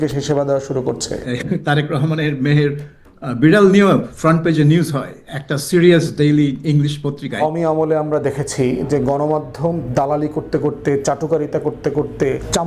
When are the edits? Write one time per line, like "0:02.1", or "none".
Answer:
0:01.2
0:07.4